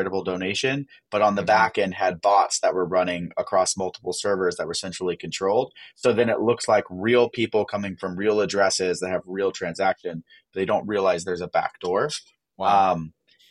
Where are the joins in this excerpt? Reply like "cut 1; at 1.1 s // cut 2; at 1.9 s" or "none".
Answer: none